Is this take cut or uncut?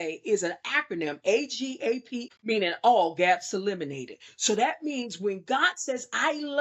cut